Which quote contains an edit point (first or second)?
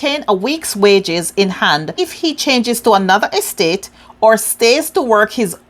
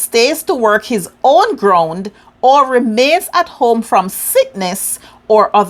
first